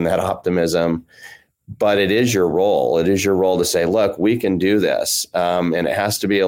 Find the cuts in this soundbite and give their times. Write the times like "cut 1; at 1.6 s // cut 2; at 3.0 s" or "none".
none